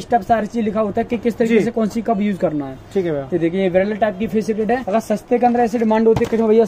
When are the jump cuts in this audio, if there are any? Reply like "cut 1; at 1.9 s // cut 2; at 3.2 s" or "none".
cut 1; at 4.8 s

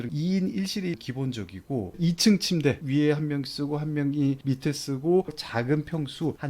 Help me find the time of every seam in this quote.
cut 1; at 1.9 s // cut 2; at 2.8 s

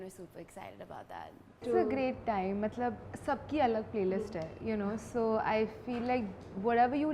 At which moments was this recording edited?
cut 1; at 1.6 s

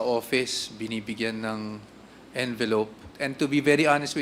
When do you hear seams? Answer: cut 1; at 3.1 s

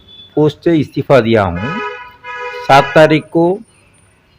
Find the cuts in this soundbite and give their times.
none

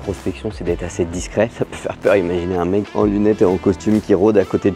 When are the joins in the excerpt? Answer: cut 1; at 1.5 s

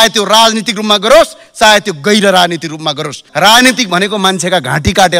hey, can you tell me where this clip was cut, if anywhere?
cut 1; at 3.2 s

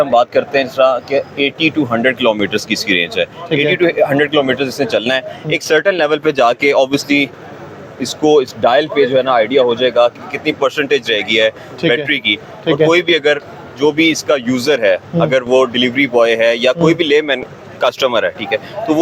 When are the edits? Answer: none

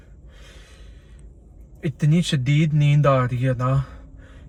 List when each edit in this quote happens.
none

